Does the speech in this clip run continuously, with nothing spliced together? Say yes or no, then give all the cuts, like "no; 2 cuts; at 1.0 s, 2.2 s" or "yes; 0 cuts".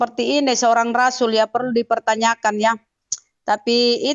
yes; 0 cuts